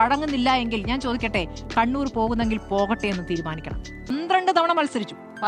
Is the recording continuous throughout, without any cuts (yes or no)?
no